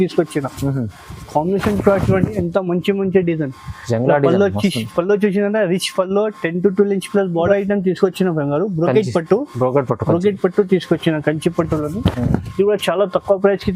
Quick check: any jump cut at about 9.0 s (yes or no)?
no